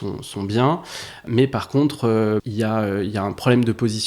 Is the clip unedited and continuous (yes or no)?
no